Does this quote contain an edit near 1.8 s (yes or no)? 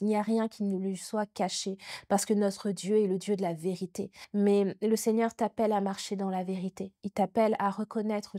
no